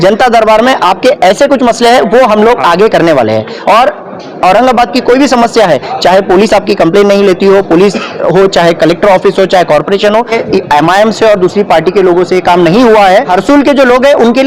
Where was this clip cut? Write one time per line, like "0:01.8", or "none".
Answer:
0:10.4
0:13.3